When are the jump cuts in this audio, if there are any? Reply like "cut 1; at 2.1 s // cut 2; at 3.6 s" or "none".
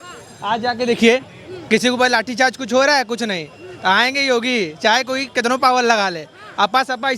none